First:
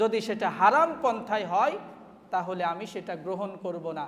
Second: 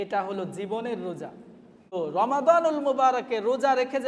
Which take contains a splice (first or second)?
second